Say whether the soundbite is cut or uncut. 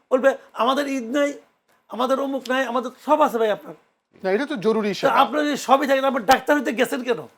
uncut